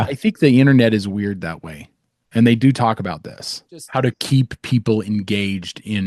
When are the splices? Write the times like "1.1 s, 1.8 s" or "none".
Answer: 3.9 s